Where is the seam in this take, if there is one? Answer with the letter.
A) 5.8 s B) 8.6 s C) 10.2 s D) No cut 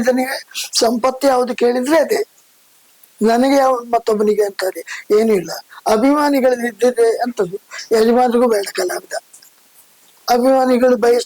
D